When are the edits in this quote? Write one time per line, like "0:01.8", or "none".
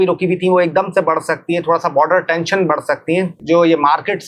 0:03.4